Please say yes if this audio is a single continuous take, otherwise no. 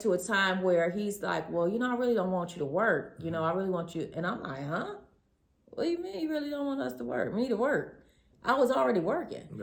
yes